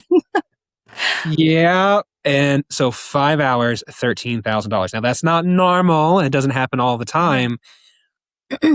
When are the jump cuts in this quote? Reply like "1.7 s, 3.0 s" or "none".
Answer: none